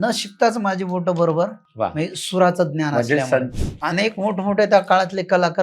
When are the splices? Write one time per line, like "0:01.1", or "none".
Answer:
0:01.6
0:03.5